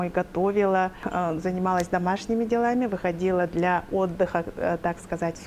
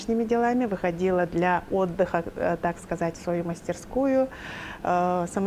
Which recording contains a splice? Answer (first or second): first